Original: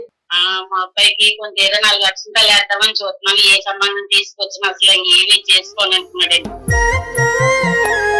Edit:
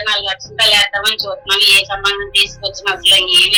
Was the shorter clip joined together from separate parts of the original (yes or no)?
no